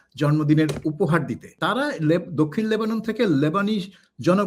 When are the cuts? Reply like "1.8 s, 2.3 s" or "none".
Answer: 1.5 s